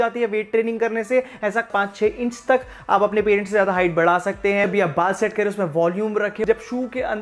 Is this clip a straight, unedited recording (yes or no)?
no